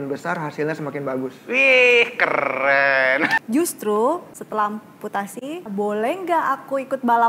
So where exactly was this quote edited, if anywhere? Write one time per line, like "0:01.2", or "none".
0:03.4
0:04.3
0:05.7